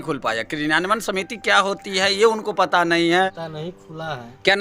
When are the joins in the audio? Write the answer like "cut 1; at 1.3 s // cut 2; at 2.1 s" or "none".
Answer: cut 1; at 3.5 s